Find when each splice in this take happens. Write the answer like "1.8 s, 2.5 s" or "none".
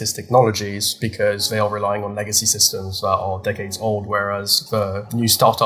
none